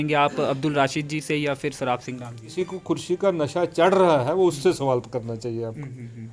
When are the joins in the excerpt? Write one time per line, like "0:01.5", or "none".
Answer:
0:02.5